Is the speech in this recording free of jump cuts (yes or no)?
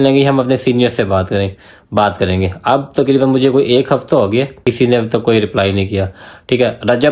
no